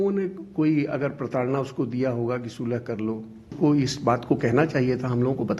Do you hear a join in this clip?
yes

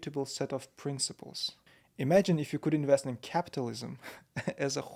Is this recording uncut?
yes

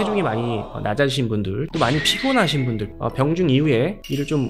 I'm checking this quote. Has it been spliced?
yes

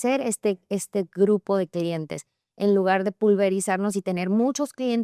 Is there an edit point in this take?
no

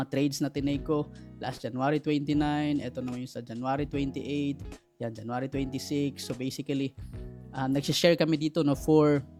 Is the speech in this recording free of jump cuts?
yes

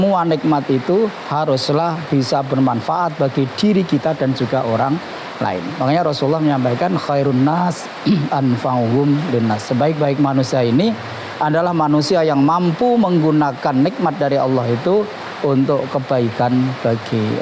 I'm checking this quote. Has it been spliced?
no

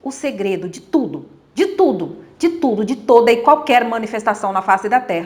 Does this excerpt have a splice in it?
no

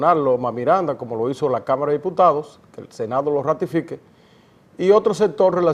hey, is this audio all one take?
no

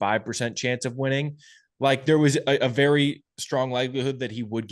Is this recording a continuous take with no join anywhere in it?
yes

